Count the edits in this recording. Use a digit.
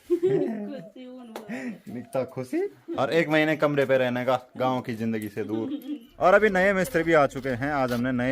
2